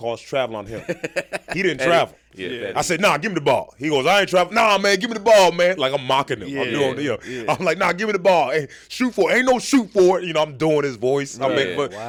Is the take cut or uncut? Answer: uncut